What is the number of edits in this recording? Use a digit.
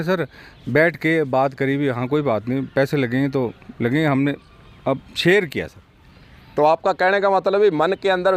0